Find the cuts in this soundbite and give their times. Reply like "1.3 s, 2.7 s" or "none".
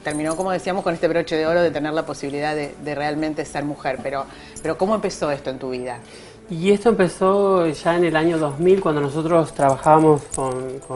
none